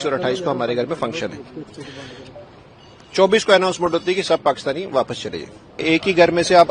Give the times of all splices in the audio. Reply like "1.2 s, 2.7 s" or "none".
5.8 s